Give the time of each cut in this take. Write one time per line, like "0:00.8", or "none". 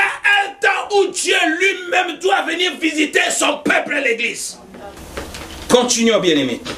none